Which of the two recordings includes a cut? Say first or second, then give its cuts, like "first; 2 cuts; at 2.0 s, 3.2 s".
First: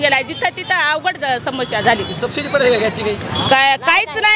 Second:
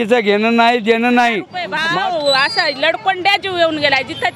second; 1 cut; at 1.8 s